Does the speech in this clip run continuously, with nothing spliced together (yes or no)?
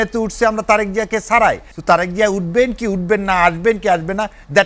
yes